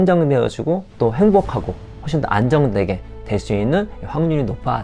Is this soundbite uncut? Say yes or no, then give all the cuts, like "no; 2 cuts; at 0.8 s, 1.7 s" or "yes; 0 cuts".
yes; 0 cuts